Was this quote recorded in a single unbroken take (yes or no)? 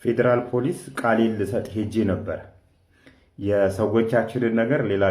yes